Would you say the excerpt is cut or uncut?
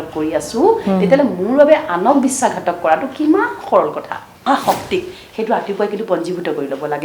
cut